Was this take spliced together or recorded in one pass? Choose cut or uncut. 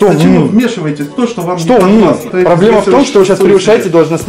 cut